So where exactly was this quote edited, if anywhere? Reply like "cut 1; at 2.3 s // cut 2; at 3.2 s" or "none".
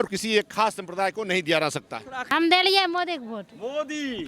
cut 1; at 2.2 s